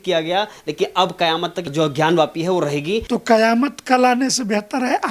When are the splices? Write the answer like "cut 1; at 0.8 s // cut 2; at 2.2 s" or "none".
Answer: cut 1; at 1.7 s // cut 2; at 3.0 s